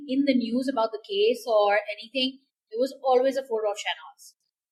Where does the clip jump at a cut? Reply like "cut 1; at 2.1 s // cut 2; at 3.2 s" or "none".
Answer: none